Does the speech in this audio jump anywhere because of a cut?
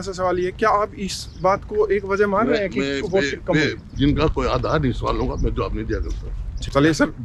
no; 0 cuts

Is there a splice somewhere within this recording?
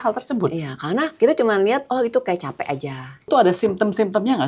yes; 2 cuts; at 1.1 s, 3.3 s

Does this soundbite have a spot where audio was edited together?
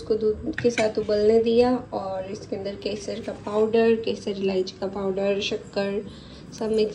no; 0 cuts

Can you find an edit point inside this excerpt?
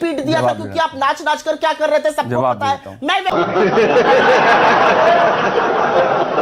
no; 0 cuts

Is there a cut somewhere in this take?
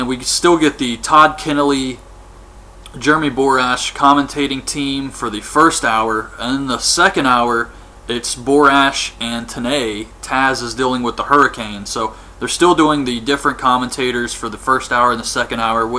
yes; 1 cut; at 13.9 s

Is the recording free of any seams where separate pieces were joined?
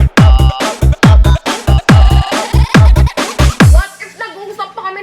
no; 1 cut; at 3.6 s

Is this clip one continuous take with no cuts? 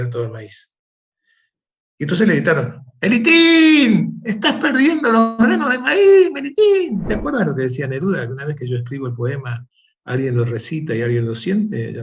no; 1 cut; at 7.1 s

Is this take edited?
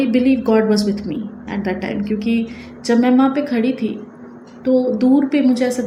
no; 0 cuts

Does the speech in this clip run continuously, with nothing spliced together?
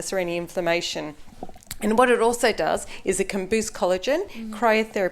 yes; 0 cuts

